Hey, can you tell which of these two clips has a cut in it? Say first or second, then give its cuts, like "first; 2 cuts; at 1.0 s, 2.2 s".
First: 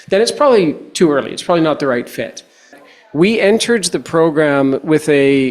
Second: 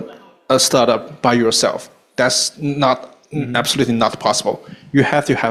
first; 1 cut; at 2.8 s